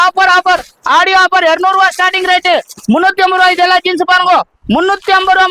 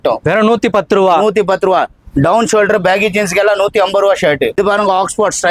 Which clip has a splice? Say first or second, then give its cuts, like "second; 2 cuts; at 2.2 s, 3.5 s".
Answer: second; 1 cut; at 4.6 s